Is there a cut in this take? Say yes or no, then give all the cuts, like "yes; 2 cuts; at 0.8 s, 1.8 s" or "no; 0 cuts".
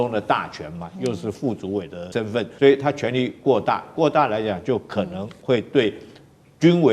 yes; 1 cut; at 2.4 s